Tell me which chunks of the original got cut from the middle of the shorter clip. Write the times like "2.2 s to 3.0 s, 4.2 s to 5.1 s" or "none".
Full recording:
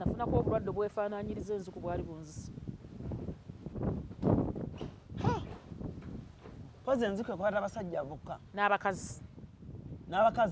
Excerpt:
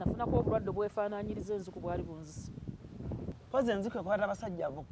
3.4 s to 6.7 s